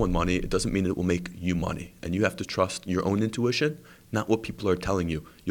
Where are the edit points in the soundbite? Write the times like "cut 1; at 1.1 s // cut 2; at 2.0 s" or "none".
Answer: none